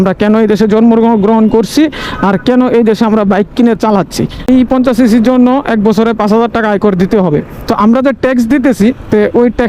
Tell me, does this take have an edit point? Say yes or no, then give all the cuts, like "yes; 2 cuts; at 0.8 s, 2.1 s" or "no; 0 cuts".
yes; 1 cut; at 4.5 s